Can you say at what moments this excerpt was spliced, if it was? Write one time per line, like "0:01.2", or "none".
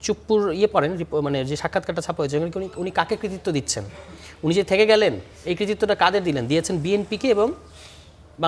none